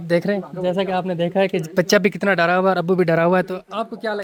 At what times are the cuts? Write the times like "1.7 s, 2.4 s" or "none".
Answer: none